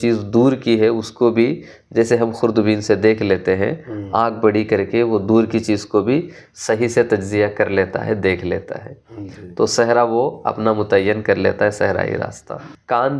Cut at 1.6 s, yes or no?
no